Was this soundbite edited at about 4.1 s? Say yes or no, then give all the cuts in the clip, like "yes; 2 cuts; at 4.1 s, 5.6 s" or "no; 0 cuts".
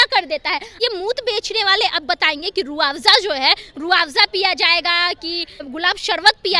no; 2 cuts; at 0.8 s, 5.6 s